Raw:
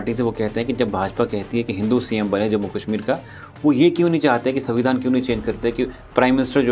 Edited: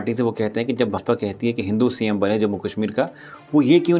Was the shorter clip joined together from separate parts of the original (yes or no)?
yes